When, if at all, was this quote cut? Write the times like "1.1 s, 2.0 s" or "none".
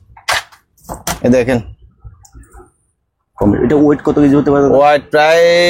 none